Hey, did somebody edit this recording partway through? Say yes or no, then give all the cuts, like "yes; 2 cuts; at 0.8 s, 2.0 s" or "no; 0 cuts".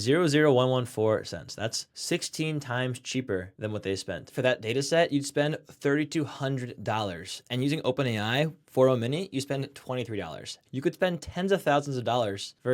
yes; 3 cuts; at 1.8 s, 4.3 s, 10.6 s